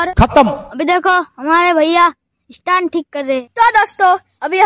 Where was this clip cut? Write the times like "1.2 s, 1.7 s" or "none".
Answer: 3.5 s